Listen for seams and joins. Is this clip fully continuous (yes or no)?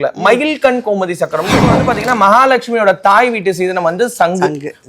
no